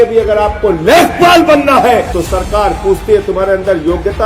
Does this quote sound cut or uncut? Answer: cut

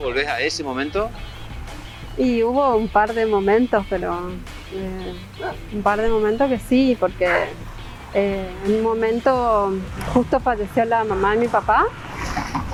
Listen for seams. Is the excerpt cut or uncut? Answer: uncut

